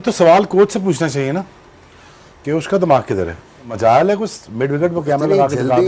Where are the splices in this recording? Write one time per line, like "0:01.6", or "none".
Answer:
0:03.7